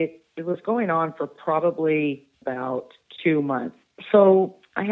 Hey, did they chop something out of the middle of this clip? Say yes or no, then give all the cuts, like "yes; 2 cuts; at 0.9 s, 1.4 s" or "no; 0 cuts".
yes; 2 cuts; at 2.3 s, 3.8 s